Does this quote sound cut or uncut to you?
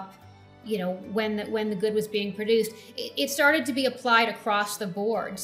uncut